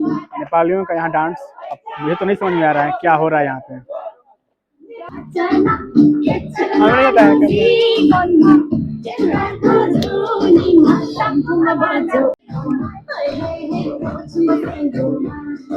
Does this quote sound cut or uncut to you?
cut